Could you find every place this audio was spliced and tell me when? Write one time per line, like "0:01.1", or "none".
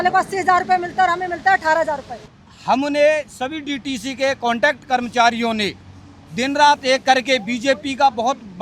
0:02.3